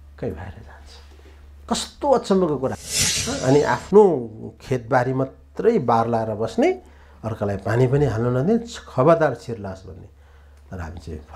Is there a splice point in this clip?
yes; 1 cut; at 2.8 s

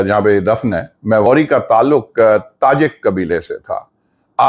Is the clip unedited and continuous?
no; 1 cut; at 1.3 s

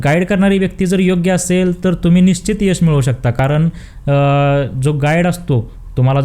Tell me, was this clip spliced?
no; 0 cuts

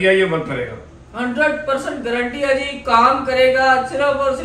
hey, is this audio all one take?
yes; 0 cuts

